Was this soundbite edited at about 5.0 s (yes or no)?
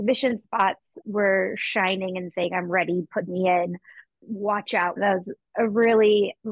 yes